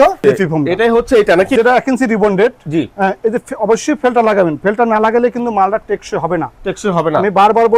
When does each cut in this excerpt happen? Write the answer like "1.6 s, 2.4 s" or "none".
1.6 s